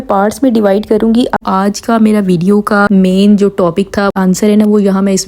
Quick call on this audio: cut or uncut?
cut